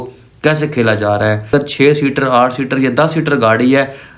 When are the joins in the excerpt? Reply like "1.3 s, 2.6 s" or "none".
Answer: 1.5 s